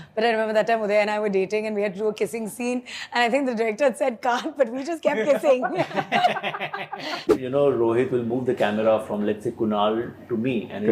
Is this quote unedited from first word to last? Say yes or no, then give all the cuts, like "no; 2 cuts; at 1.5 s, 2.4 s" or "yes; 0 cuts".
no; 1 cut; at 7.2 s